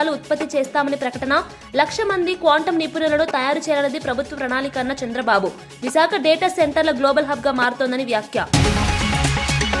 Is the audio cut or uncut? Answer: cut